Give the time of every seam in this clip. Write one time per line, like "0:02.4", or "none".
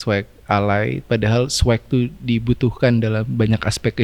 none